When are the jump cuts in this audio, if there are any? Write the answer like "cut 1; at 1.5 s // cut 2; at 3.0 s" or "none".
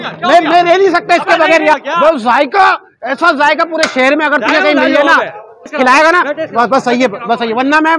cut 1; at 1.7 s // cut 2; at 5.7 s